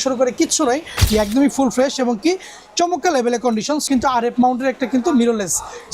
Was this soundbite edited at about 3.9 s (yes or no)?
yes